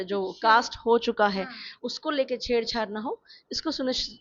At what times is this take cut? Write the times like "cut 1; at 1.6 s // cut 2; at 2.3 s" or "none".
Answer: none

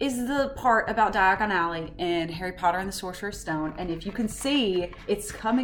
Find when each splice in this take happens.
none

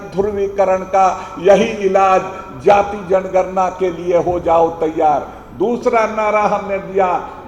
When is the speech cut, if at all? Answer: none

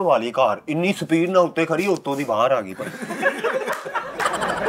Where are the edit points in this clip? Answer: none

